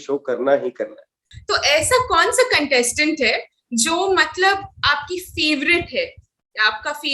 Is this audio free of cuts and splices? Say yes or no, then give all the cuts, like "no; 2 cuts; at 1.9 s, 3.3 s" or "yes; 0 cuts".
yes; 0 cuts